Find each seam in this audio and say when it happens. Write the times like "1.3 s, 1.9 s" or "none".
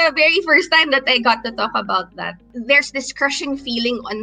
2.5 s